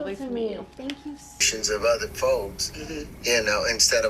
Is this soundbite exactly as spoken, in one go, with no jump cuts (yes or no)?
no